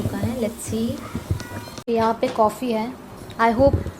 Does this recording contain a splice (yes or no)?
yes